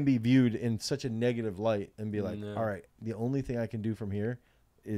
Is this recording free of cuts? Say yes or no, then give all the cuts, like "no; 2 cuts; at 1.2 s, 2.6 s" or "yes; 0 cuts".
yes; 0 cuts